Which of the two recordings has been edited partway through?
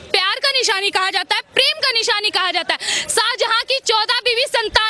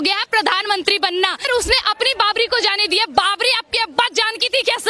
second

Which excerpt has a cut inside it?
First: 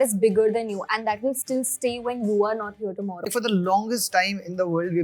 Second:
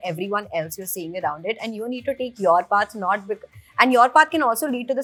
first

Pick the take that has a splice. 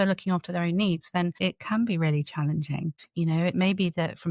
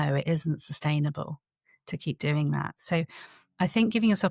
first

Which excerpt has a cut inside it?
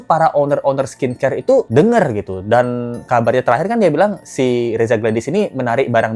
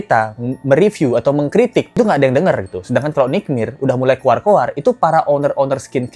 second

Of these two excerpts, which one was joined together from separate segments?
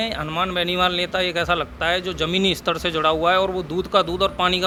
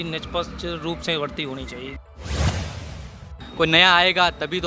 second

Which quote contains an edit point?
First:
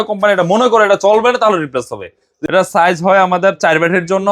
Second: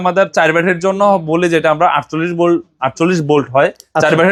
first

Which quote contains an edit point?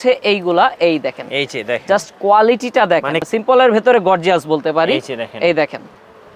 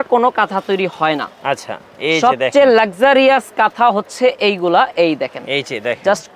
first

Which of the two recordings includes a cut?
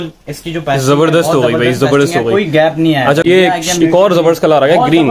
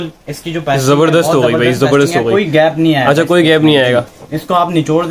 first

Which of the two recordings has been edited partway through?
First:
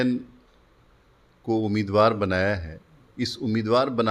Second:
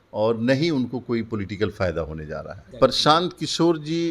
second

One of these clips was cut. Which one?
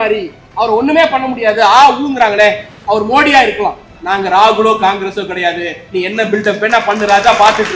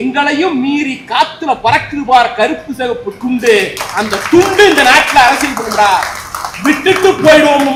first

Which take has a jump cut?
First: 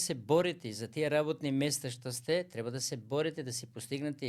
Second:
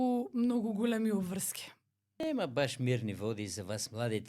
second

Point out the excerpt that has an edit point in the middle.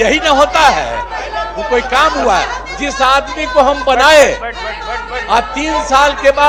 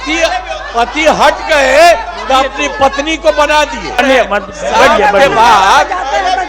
second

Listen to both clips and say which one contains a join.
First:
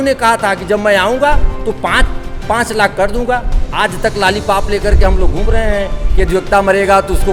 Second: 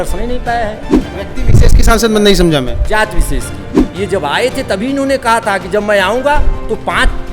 second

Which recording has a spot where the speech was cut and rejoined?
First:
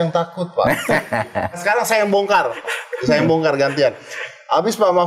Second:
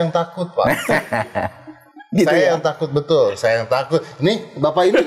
first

